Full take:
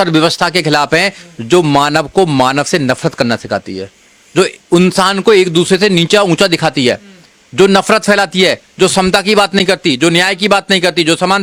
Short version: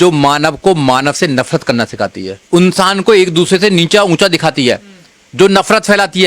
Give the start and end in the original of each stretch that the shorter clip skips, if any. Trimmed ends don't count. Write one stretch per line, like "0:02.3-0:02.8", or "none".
0:03.9-0:04.6